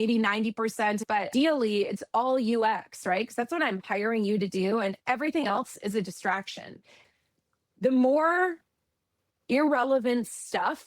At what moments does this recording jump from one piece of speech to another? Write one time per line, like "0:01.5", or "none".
0:01.0
0:07.0